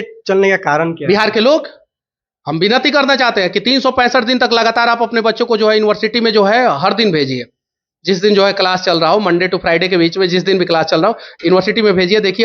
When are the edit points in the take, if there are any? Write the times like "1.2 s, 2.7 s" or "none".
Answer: none